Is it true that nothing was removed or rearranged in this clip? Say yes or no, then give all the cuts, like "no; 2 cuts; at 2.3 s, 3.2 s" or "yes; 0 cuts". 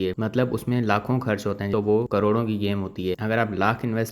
no; 1 cut; at 1.7 s